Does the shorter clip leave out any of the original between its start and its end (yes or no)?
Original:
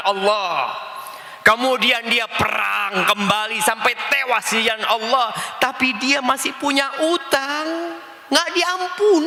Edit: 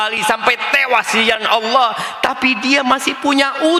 no